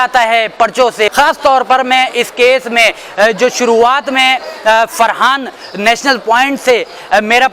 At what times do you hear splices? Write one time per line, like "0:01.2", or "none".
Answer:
0:01.1